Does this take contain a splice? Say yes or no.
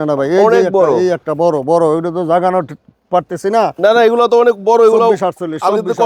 no